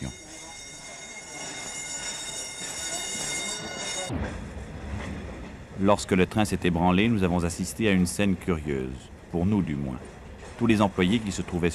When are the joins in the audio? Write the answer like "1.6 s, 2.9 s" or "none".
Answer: 6.2 s